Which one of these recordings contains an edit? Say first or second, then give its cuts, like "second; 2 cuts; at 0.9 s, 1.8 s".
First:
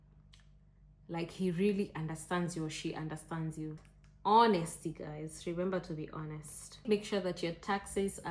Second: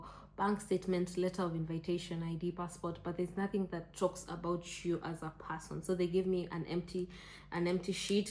first; 2 cuts; at 3.9 s, 6.8 s